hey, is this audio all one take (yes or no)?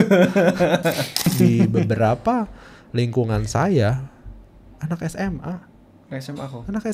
no